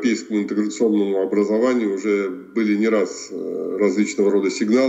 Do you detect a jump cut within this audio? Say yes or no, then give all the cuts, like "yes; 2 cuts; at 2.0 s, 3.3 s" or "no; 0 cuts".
no; 0 cuts